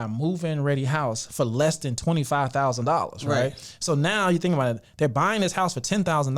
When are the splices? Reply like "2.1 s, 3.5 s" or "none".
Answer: none